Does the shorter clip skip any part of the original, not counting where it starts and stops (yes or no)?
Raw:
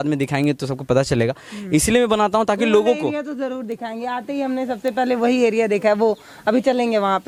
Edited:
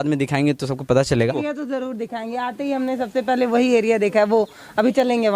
yes